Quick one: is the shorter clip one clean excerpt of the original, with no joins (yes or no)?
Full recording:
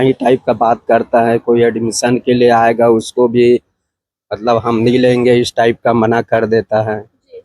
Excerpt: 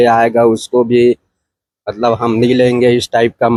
yes